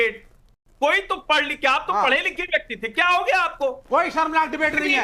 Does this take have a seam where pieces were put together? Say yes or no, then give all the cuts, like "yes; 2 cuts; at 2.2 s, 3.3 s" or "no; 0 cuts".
no; 0 cuts